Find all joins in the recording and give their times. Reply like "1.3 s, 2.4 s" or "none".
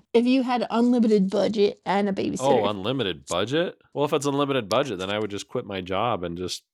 3.9 s